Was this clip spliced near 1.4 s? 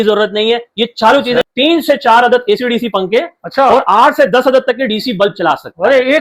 yes; 1 cut; at 1.4 s

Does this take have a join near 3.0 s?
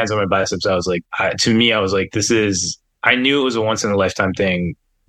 no; 1 cut; at 1.0 s

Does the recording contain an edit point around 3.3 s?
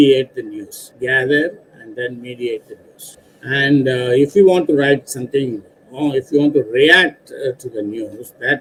no; 0 cuts

